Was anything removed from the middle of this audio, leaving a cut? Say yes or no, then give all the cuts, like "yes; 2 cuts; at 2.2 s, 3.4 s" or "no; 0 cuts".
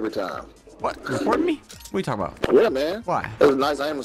yes; 3 cuts; at 1.0 s, 2.3 s, 3.0 s